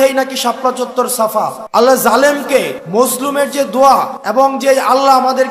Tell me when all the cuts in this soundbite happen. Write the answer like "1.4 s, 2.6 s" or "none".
1.6 s, 2.8 s, 4.2 s